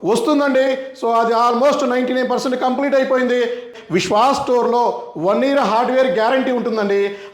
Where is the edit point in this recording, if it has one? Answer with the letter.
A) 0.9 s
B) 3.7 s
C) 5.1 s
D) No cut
B